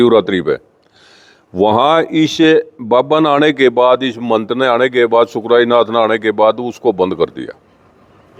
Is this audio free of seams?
yes; 0 cuts

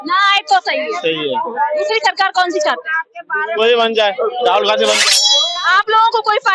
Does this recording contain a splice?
yes; 1 cut; at 5.0 s

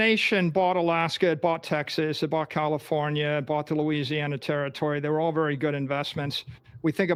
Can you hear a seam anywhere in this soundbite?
no; 0 cuts

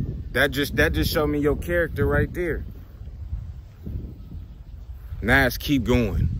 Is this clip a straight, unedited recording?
yes; 0 cuts

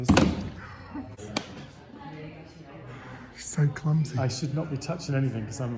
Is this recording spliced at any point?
yes; 1 cut; at 1.2 s

